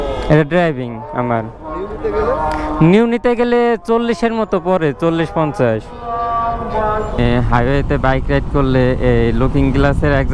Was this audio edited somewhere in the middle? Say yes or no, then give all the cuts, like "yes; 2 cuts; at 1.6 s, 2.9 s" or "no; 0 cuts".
yes; 1 cut; at 7.2 s